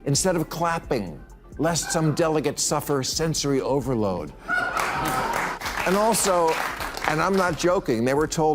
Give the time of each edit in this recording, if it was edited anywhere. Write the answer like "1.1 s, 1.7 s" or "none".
5.6 s